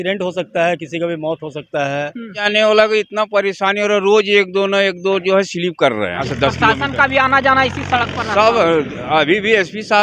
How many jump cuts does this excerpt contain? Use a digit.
2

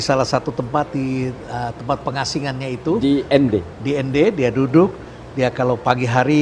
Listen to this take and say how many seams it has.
0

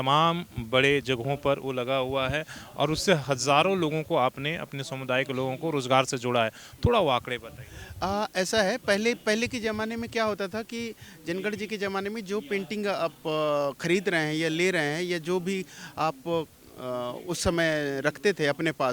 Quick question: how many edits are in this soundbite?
0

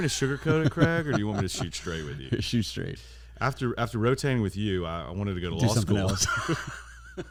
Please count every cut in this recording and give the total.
0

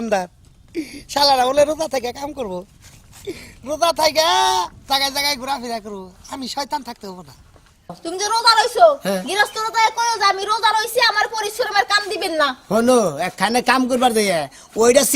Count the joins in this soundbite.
1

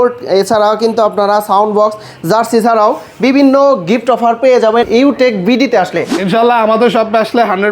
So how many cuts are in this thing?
1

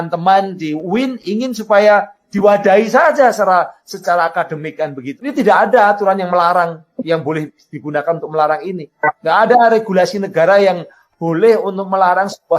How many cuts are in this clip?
1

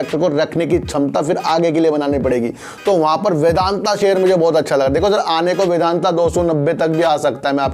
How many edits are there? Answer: 0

